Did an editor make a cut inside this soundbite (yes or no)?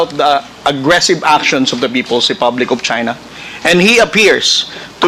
no